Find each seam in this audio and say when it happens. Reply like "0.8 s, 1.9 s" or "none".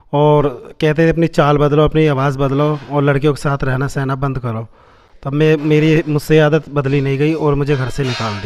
none